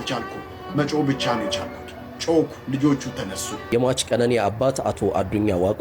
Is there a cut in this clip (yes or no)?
yes